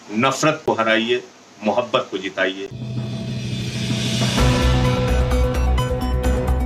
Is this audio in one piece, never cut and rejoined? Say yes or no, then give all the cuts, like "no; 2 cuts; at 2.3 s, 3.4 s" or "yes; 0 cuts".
yes; 0 cuts